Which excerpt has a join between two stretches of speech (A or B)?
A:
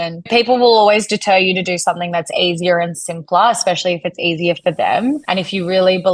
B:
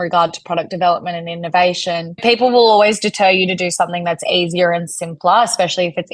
A